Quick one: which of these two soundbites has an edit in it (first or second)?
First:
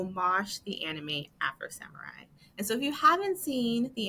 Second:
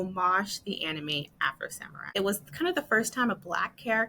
second